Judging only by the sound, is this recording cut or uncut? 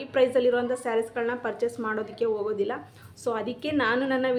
uncut